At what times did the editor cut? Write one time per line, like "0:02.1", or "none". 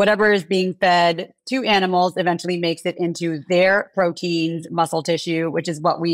none